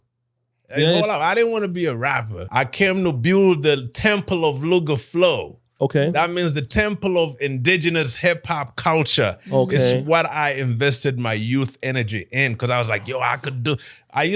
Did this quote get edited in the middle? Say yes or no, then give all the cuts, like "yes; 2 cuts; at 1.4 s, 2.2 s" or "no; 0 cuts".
yes; 1 cut; at 2.5 s